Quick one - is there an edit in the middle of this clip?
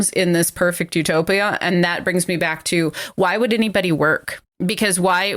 no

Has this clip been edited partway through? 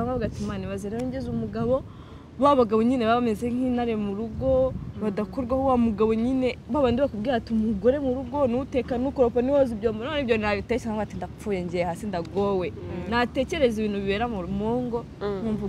no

